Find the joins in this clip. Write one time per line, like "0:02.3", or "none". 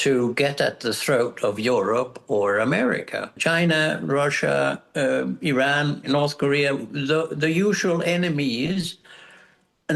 0:03.4
0:06.0

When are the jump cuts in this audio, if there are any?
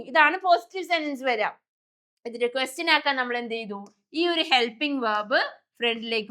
none

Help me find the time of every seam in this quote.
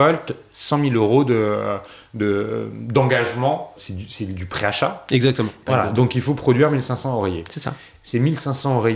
0:03.7
0:05.6

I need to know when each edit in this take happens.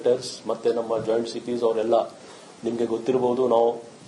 0:01.7

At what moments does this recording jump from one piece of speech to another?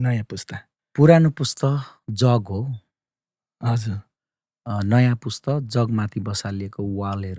none

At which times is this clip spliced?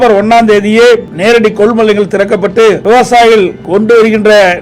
0:01.1
0:02.8
0:03.6

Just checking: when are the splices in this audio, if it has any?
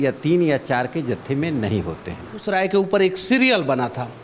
0:02.5

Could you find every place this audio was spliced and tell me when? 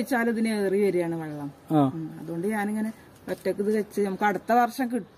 none

